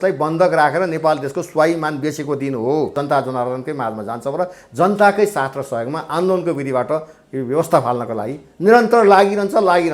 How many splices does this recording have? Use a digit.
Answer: 1